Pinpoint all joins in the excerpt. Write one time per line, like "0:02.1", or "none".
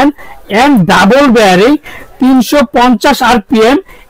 none